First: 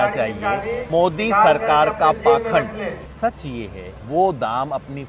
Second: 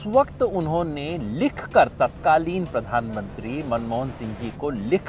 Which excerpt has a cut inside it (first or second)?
first